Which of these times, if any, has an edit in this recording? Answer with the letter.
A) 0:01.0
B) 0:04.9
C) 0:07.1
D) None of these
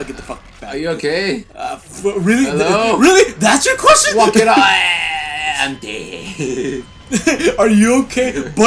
D